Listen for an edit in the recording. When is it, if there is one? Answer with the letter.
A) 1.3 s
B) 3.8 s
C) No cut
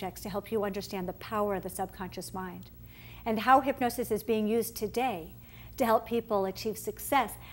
C